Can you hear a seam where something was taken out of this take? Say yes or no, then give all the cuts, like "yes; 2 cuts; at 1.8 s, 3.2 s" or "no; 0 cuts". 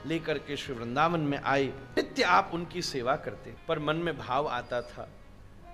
yes; 2 cuts; at 1.8 s, 3.4 s